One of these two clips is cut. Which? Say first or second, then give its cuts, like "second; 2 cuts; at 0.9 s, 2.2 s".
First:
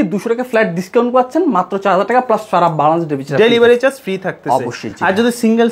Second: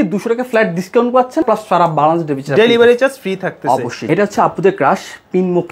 second; 2 cuts; at 1.4 s, 4.0 s